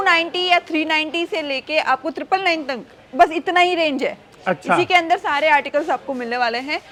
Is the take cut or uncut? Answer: uncut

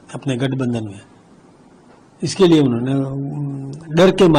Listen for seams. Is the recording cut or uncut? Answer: uncut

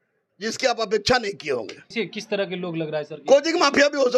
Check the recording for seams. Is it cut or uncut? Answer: cut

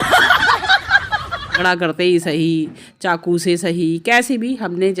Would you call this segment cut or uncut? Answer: cut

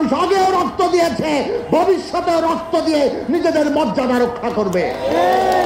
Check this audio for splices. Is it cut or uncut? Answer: uncut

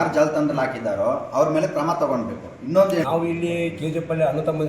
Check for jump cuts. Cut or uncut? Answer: cut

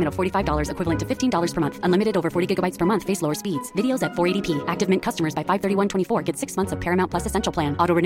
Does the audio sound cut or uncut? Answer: uncut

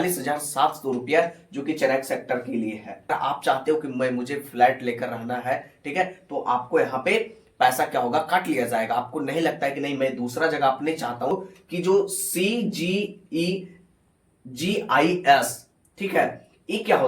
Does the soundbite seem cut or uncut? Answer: cut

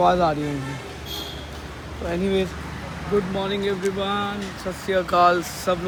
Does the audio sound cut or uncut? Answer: uncut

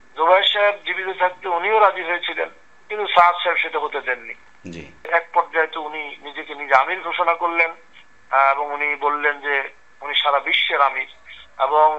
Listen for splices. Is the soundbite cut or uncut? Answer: cut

